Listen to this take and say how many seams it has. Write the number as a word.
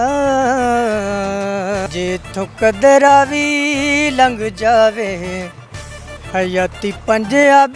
one